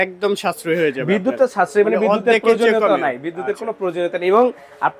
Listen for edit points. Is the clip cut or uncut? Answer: uncut